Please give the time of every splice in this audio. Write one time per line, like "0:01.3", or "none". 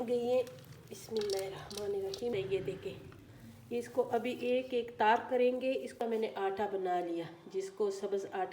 0:02.3
0:05.9